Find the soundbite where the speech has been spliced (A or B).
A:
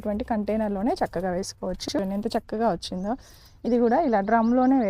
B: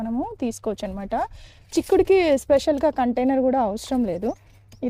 A